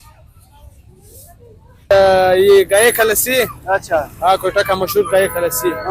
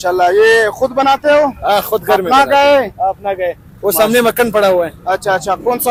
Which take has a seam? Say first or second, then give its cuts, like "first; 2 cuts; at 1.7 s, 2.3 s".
first; 1 cut; at 1.9 s